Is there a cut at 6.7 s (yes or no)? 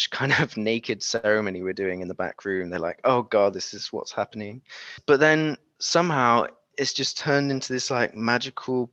no